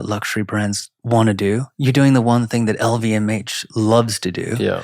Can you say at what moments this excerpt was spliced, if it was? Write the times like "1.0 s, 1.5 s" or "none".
0.9 s